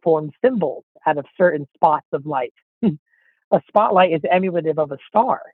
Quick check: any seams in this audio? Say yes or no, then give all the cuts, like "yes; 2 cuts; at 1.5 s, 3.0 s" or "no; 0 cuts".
no; 0 cuts